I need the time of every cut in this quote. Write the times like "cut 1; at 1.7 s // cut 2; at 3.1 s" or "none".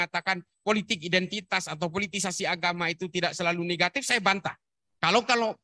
none